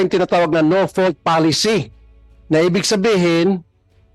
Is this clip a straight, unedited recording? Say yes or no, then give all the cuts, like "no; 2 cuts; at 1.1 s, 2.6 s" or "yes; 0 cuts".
yes; 0 cuts